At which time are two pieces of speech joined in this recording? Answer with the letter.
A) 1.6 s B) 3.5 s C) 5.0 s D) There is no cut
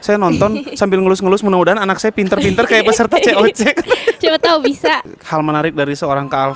C